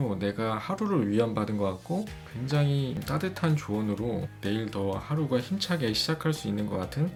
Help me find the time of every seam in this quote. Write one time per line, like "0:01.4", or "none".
none